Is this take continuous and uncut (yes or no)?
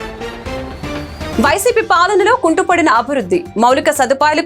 no